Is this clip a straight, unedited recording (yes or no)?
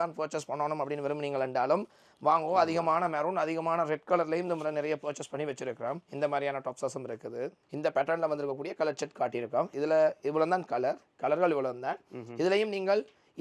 yes